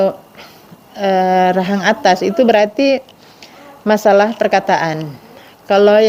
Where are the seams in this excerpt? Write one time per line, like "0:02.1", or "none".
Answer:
none